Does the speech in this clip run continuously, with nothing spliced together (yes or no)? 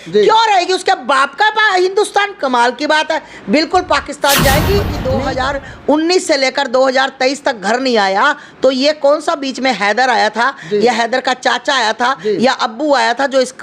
no